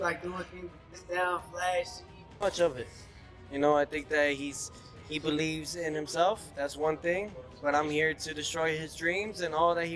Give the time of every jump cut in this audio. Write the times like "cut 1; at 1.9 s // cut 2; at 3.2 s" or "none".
cut 1; at 1.0 s // cut 2; at 2.4 s